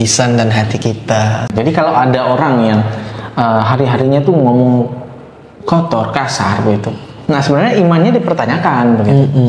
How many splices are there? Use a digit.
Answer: 1